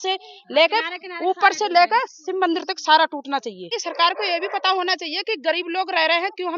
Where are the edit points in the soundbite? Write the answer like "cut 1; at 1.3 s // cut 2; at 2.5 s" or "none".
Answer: cut 1; at 3.8 s